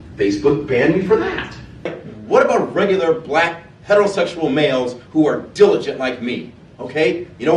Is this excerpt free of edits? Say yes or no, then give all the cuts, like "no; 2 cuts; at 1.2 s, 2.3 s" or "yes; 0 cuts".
no; 1 cut; at 2.0 s